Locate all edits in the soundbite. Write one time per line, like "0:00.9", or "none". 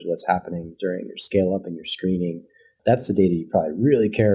none